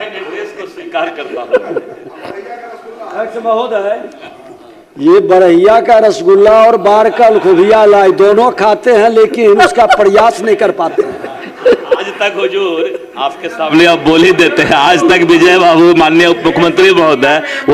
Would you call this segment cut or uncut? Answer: uncut